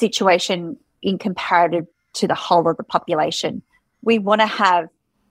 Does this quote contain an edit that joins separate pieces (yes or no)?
no